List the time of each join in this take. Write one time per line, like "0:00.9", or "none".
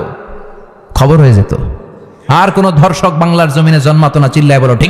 none